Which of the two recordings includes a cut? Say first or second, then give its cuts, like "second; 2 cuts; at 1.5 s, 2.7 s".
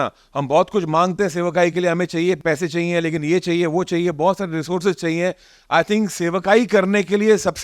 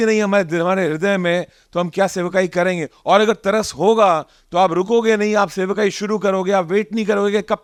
first; 1 cut; at 2.4 s